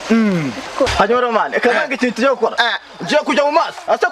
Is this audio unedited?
no; 1 cut; at 0.9 s

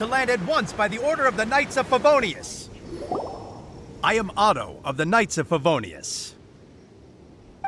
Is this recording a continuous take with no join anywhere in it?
yes; 0 cuts

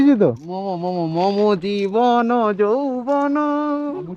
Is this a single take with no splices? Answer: yes; 0 cuts

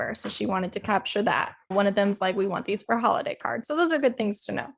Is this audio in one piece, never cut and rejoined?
yes; 0 cuts

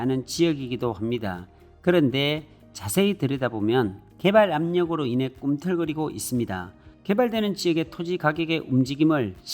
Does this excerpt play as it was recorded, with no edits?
no; 1 cut; at 6.9 s

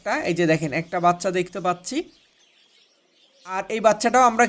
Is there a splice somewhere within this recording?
no; 0 cuts

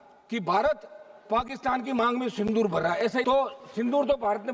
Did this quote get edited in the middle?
yes; 1 cut; at 3.2 s

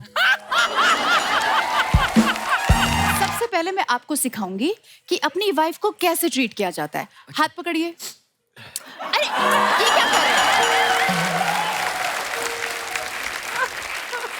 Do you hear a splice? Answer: yes; 1 cut; at 3.3 s

